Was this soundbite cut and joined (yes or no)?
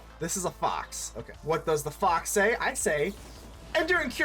yes